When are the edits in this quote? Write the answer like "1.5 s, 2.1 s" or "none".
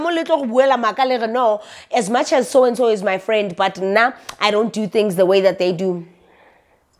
none